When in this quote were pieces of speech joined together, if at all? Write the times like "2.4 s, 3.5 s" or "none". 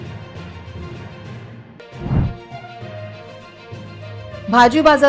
1.7 s